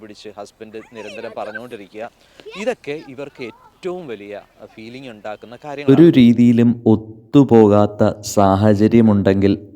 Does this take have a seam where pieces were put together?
yes; 1 cut; at 5.8 s

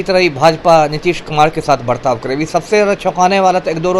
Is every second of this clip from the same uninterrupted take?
yes; 0 cuts

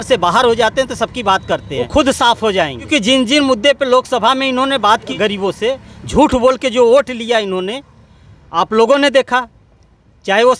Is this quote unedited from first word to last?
no; 3 cuts; at 1.9 s, 2.9 s, 5.1 s

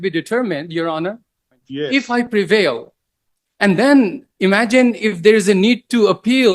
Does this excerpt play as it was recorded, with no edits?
no; 1 cut; at 1.6 s

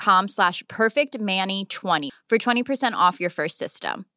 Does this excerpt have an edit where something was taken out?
yes; 1 cut; at 2.1 s

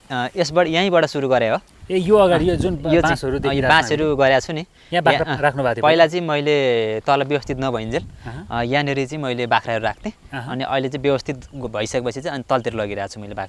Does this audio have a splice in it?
no; 0 cuts

